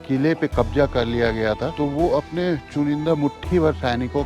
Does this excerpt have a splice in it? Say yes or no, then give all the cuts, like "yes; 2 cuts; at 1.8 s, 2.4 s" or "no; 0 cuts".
no; 0 cuts